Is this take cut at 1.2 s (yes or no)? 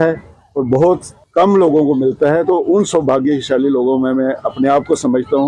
yes